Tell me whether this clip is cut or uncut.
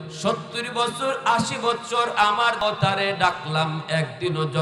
cut